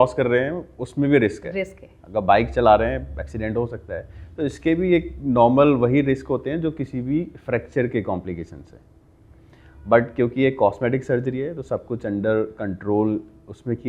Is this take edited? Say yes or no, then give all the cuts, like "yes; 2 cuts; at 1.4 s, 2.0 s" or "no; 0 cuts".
no; 0 cuts